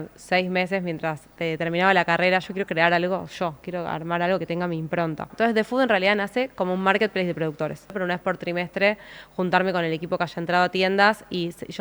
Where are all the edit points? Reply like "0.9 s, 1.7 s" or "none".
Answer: 2.5 s, 5.3 s, 8.0 s